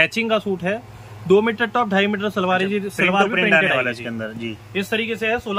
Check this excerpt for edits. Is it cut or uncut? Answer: uncut